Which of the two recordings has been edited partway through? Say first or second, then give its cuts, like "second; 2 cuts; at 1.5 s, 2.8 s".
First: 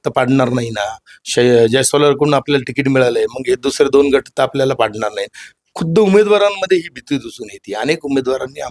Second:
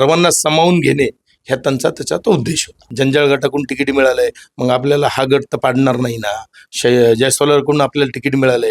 second; 1 cut; at 2.8 s